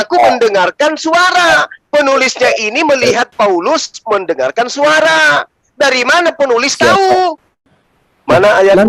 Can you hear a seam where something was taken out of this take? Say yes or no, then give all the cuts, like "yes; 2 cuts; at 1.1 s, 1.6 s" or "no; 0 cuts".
yes; 1 cut; at 7.7 s